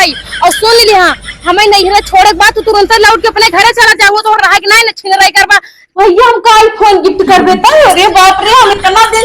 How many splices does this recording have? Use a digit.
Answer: 1